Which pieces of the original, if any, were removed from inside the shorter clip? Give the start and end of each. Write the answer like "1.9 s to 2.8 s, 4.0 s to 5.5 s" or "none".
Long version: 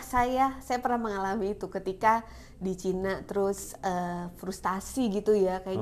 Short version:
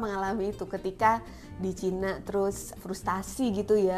3.7 s to 4.3 s